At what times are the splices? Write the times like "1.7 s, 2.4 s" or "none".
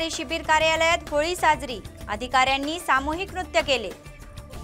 none